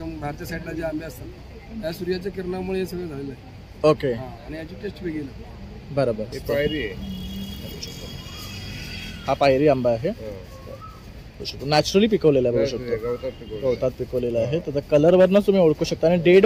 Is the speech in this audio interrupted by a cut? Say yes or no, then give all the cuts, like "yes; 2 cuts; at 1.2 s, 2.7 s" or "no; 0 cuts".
yes; 1 cut; at 6.3 s